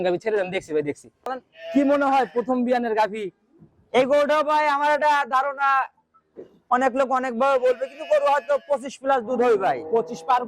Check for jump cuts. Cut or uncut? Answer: cut